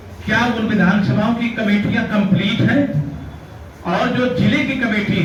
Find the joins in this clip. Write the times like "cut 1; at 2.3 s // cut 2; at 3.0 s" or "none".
none